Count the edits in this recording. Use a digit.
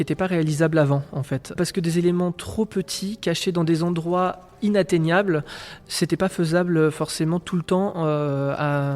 1